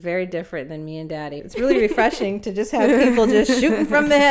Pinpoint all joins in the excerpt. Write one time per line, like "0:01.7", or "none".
0:01.4